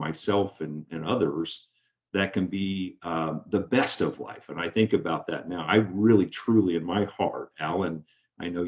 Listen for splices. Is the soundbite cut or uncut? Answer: uncut